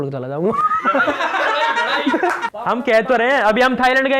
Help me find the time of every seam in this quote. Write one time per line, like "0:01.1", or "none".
0:02.4